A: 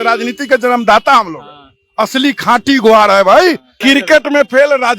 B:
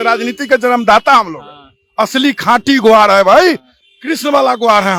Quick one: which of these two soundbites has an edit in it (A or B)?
A